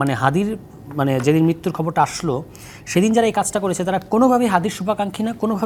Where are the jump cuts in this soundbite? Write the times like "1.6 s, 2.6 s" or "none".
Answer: none